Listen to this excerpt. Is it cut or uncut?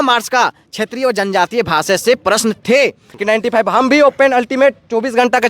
cut